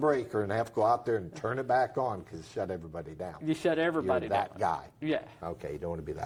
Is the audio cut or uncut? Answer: uncut